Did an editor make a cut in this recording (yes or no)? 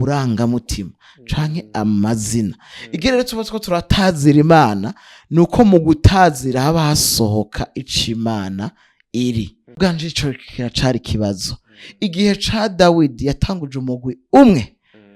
yes